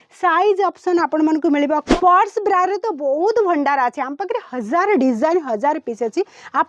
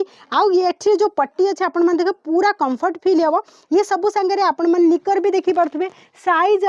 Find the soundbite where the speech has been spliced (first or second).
first